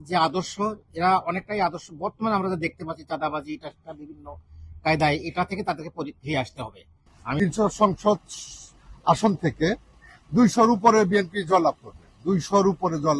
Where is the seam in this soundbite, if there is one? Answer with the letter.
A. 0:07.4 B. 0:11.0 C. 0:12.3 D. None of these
A